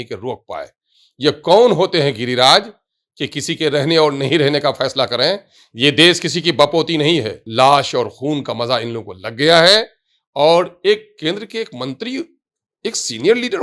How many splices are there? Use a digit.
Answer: 1